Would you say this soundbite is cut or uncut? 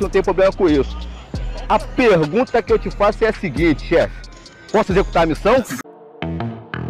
cut